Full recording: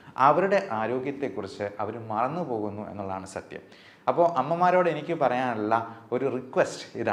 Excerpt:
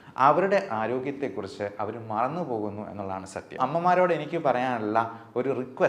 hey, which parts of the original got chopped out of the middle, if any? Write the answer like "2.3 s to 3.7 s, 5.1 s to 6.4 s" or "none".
3.6 s to 4.3 s